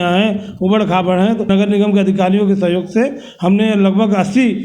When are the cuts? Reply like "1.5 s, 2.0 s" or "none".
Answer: 1.5 s